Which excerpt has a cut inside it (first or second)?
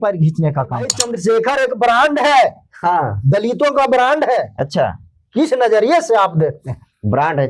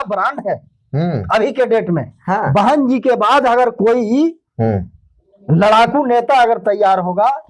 first